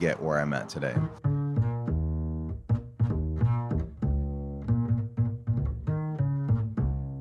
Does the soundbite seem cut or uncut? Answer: cut